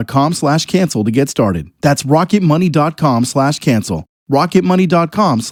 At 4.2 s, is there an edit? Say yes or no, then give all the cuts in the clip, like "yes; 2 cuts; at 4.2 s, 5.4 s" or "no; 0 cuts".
no; 0 cuts